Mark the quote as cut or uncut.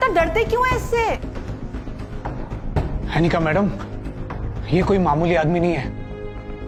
uncut